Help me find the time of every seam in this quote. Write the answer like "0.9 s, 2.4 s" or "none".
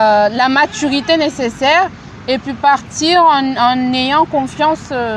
none